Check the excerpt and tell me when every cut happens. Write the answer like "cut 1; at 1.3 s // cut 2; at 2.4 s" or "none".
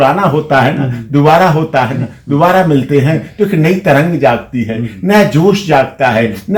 none

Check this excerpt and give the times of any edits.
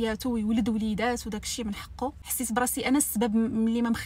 cut 1; at 2.2 s

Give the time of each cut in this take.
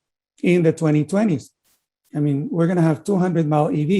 cut 1; at 1.7 s

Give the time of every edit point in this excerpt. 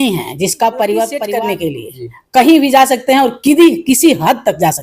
cut 1; at 1.3 s

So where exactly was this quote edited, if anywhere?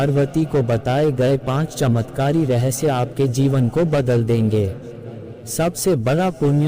cut 1; at 5.3 s

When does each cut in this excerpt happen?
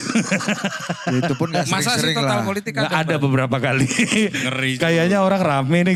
none

